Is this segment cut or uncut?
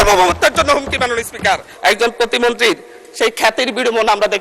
cut